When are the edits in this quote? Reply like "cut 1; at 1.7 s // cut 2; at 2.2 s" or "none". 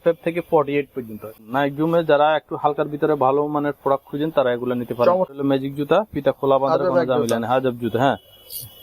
cut 1; at 1.4 s // cut 2; at 5.3 s